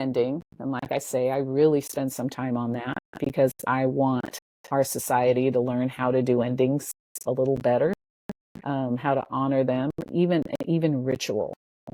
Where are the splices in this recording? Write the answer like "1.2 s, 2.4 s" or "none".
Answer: none